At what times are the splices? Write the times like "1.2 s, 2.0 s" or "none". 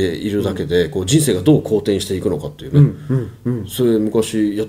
none